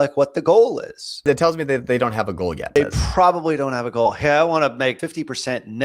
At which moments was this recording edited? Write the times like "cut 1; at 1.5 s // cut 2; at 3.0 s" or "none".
cut 1; at 1.2 s // cut 2; at 2.8 s // cut 3; at 5.0 s